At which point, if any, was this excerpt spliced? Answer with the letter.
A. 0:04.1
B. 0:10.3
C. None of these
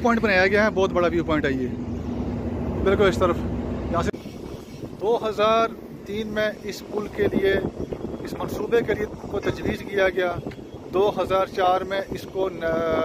A